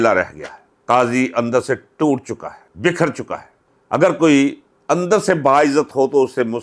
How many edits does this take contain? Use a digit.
0